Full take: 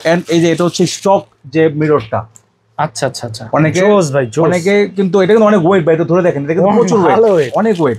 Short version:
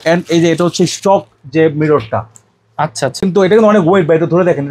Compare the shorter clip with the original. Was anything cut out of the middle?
yes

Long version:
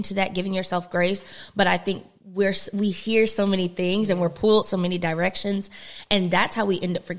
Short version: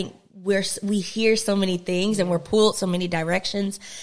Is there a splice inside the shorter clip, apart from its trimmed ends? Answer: no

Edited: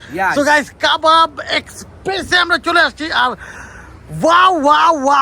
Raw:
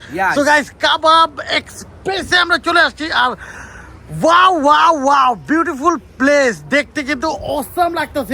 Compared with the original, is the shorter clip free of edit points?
yes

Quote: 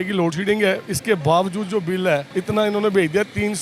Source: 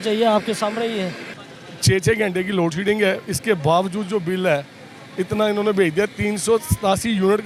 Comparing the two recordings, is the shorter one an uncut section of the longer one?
no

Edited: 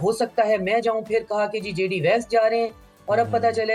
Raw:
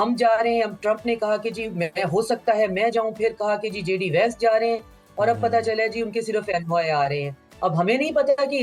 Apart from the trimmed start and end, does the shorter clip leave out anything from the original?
no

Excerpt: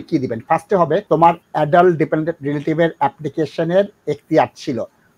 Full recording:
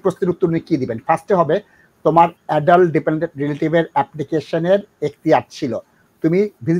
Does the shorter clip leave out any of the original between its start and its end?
yes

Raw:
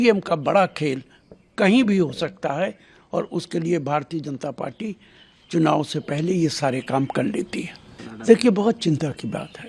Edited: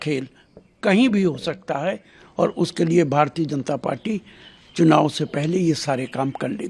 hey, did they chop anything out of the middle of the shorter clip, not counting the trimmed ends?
no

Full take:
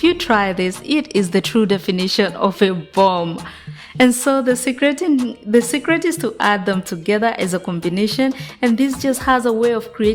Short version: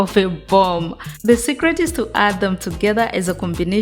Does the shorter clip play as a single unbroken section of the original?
no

